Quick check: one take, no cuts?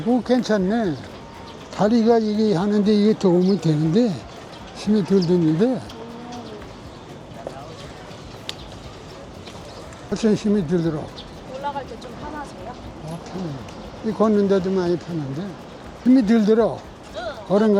yes; 0 cuts

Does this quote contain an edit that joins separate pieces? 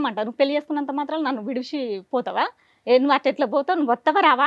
no; 0 cuts

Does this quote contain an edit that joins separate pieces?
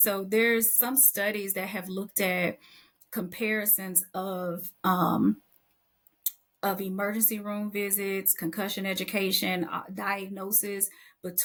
no; 0 cuts

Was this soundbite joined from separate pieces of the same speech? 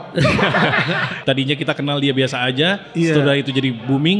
yes; 1 cut; at 1.1 s

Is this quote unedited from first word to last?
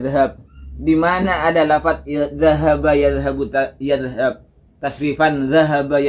yes; 0 cuts

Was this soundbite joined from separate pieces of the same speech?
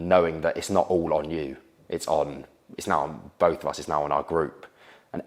no; 0 cuts

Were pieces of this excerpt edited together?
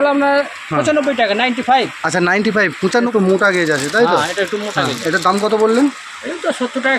yes; 1 cut; at 3.1 s

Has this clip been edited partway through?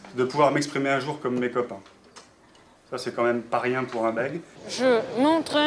yes; 1 cut; at 4.6 s

